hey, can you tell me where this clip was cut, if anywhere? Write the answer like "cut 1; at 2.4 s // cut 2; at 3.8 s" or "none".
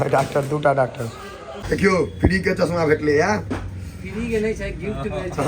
cut 1; at 1.6 s